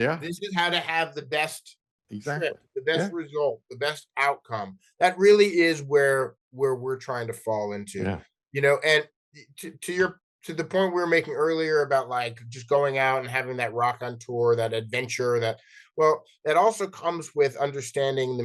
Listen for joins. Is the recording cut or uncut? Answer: uncut